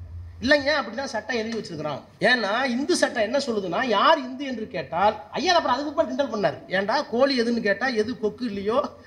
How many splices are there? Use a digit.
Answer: 1